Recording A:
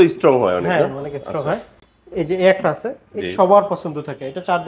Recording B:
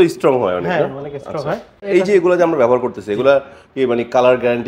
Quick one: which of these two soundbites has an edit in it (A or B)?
B